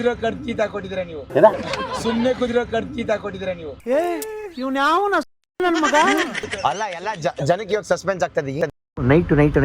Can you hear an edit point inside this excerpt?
no; 0 cuts

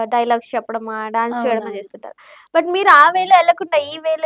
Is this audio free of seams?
yes; 0 cuts

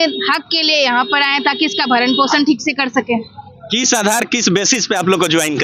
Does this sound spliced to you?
no; 0 cuts

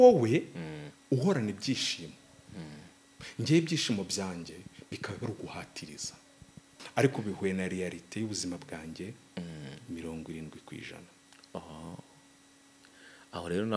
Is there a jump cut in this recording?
yes; 1 cut; at 6.8 s

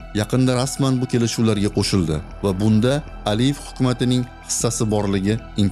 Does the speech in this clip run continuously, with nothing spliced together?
yes; 0 cuts

